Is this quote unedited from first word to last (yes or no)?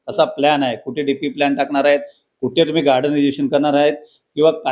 yes